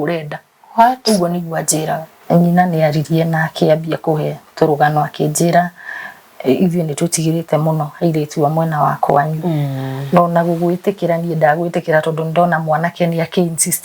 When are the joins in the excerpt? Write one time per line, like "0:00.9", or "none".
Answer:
0:02.1